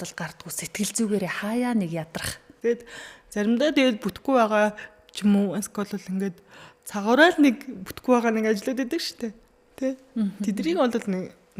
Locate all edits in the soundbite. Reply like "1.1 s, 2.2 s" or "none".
2.4 s